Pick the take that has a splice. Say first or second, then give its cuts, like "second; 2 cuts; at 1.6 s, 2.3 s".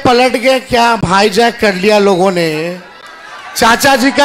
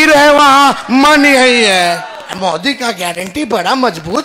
second; 1 cut; at 2.2 s